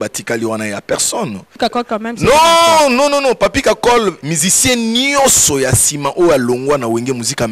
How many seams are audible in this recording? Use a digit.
2